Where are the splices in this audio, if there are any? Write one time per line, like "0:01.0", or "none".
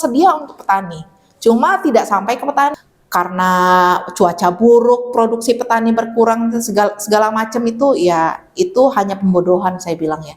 0:02.8